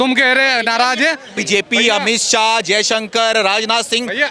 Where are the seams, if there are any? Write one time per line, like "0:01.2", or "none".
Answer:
0:01.4